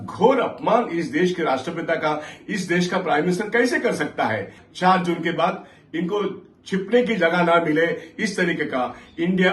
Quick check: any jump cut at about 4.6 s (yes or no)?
yes